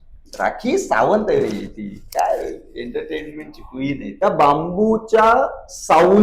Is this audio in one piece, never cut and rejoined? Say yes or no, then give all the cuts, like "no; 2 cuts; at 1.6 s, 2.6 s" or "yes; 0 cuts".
no; 1 cut; at 4.1 s